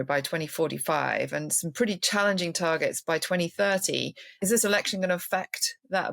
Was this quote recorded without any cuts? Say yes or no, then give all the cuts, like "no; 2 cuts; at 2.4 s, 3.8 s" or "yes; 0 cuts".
no; 1 cut; at 4.3 s